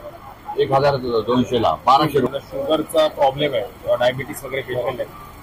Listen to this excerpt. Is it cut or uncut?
cut